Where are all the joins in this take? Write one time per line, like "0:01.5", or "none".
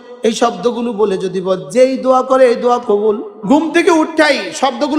0:03.3